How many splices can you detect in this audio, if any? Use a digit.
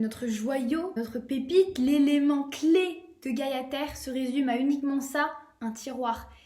1